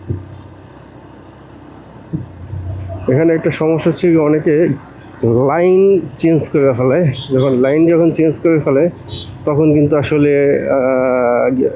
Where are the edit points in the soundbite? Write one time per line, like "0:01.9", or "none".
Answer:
none